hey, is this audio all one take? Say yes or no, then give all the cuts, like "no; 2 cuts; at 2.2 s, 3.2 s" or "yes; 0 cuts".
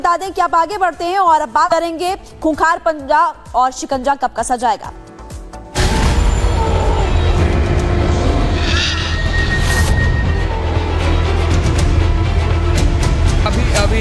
no; 1 cut; at 1.7 s